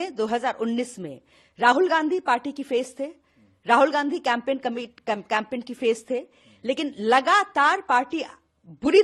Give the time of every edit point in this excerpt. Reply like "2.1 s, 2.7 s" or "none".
none